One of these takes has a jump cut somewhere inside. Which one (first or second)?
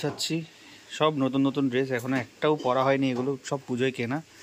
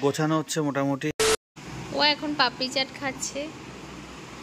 second